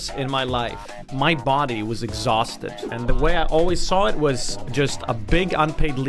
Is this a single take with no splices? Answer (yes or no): no